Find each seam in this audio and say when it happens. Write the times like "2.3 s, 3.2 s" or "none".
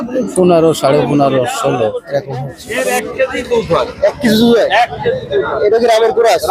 2.6 s